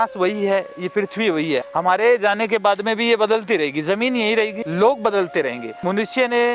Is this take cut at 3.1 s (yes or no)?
no